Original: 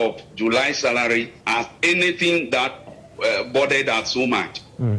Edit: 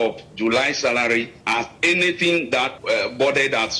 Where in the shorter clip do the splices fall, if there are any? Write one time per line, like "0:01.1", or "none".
0:02.8